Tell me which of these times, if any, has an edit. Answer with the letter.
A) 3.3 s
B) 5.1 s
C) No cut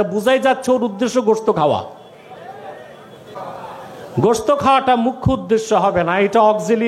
A